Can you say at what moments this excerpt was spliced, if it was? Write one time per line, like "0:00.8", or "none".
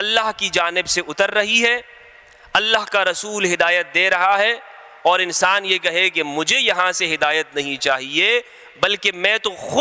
none